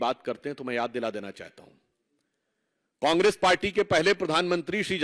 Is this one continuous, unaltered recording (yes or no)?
yes